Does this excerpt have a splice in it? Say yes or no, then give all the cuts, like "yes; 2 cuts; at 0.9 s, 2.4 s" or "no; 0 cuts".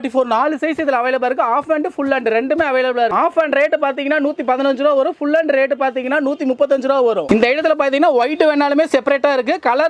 no; 0 cuts